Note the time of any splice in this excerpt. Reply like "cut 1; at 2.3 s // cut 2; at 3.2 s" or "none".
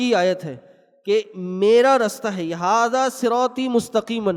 none